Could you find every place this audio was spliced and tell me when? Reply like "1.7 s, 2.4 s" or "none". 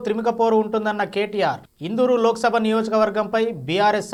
none